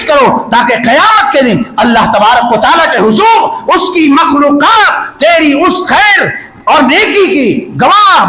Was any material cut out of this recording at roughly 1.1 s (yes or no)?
no